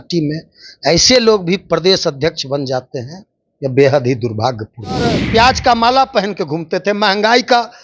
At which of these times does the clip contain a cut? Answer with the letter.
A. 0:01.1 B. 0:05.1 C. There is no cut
B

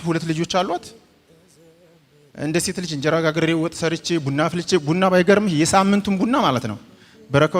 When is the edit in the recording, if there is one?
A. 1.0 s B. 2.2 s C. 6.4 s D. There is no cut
D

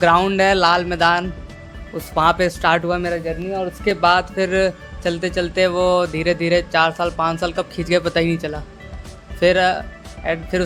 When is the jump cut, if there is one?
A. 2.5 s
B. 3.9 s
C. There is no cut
C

